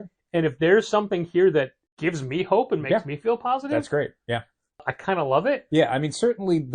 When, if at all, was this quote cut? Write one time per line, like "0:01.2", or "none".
0:01.8

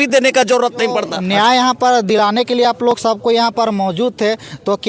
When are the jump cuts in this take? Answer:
0:01.2

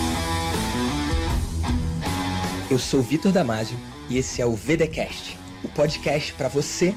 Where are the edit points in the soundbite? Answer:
none

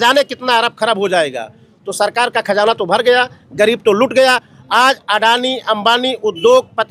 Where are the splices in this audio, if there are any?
none

